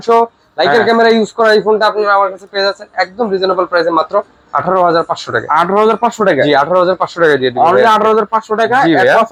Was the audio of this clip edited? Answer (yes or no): no